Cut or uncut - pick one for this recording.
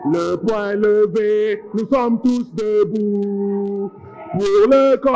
uncut